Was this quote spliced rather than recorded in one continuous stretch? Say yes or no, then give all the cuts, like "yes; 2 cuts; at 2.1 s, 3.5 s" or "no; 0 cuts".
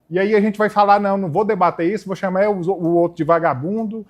no; 0 cuts